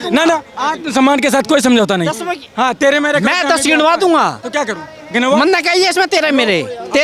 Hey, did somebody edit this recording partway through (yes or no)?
no